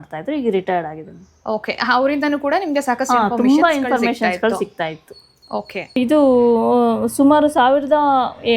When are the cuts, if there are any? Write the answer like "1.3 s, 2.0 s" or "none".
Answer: 5.8 s